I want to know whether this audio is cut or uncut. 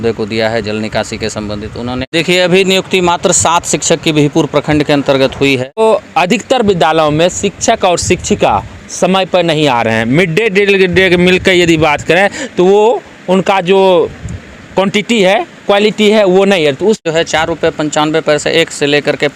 cut